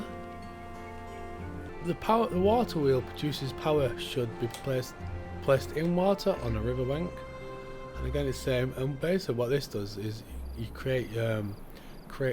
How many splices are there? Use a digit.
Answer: 1